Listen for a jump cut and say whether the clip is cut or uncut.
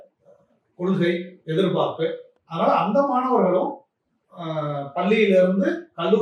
uncut